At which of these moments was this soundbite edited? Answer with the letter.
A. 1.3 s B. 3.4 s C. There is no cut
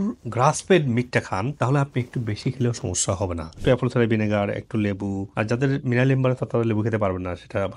B